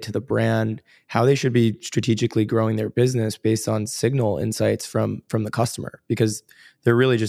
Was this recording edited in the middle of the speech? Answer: no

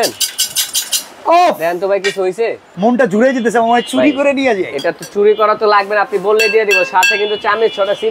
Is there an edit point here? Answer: yes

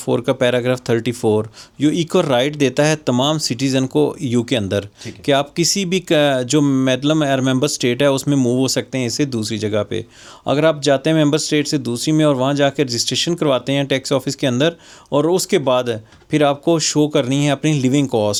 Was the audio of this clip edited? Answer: no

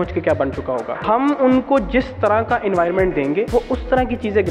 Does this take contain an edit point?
yes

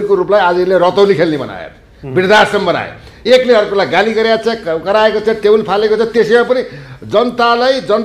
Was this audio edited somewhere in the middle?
no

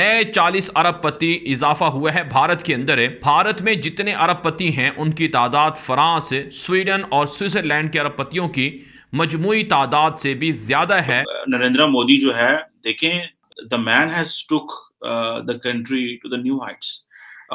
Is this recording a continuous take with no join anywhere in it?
no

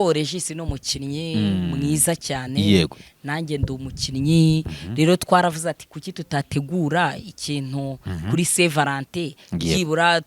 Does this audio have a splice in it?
no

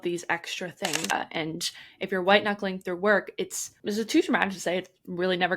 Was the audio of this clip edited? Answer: yes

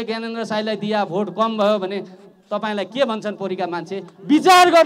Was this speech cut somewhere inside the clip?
no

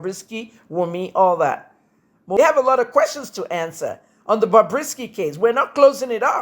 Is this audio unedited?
no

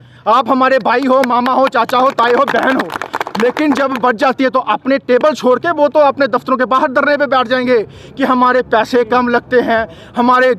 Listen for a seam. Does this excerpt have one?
no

